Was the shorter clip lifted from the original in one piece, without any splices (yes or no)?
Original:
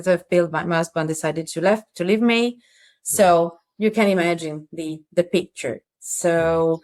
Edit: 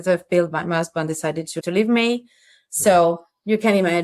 no